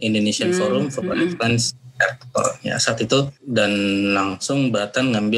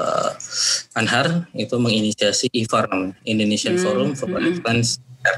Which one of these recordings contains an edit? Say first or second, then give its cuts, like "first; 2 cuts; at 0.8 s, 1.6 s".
first; 1 cut; at 3.4 s